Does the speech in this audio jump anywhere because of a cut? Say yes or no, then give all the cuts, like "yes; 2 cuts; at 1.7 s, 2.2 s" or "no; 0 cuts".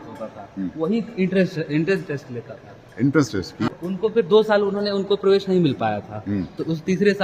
yes; 1 cut; at 3.7 s